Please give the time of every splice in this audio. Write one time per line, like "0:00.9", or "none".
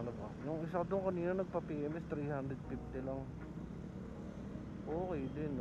none